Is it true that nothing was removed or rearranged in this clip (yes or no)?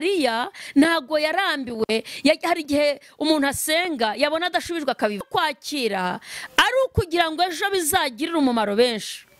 no